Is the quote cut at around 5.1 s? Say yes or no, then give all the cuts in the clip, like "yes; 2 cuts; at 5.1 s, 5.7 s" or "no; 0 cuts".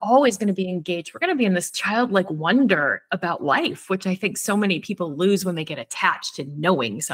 no; 0 cuts